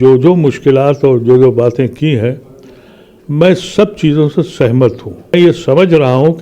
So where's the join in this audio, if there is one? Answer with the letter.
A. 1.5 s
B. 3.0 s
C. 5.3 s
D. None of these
C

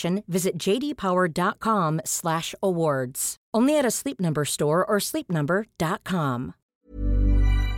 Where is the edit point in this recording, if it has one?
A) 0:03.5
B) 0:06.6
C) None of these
B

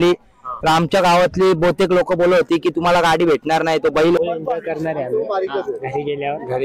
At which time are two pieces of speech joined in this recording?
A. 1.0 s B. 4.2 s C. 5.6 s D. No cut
B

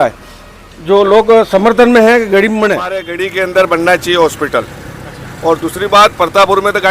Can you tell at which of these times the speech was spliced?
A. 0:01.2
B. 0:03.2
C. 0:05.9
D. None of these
B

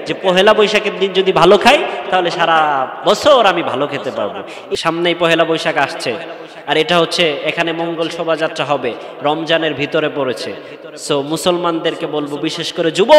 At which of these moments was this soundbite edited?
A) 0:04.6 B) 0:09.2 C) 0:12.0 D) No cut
A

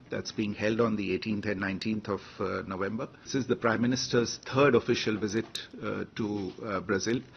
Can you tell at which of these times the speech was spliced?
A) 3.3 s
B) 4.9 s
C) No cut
A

